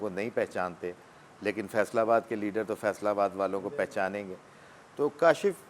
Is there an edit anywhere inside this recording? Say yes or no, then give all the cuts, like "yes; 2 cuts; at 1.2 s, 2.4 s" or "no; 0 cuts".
no; 0 cuts